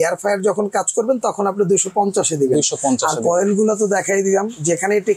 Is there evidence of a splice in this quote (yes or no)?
no